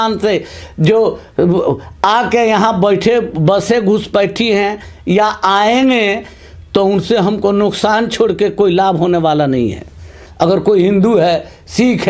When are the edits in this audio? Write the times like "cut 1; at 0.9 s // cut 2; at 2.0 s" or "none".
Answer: cut 1; at 10.2 s